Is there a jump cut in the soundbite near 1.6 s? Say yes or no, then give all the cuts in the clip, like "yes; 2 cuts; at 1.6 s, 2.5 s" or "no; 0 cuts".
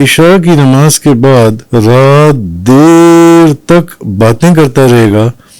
yes; 1 cut; at 1.6 s